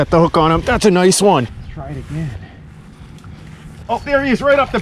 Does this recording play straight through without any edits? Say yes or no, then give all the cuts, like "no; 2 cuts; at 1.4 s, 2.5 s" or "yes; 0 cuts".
no; 2 cuts; at 1.6 s, 3.8 s